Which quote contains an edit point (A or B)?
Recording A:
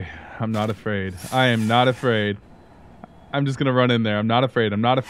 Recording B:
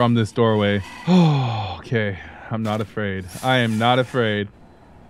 B